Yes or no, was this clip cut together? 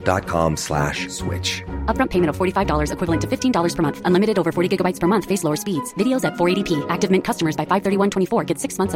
no